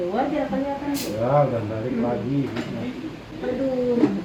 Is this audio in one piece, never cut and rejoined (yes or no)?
yes